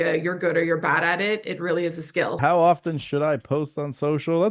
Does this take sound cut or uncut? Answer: cut